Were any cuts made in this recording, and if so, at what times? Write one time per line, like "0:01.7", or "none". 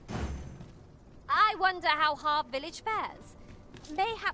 0:00.9